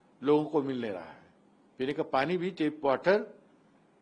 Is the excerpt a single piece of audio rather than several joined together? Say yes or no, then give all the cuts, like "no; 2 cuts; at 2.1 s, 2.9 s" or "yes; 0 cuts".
yes; 0 cuts